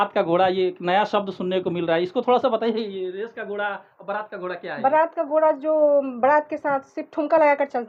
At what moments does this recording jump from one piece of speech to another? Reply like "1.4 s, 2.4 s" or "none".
none